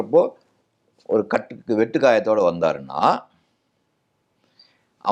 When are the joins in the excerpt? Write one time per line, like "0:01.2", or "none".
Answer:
none